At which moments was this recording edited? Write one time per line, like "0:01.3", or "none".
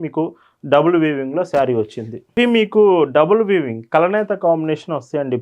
0:02.2